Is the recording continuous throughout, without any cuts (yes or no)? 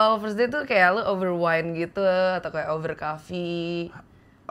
yes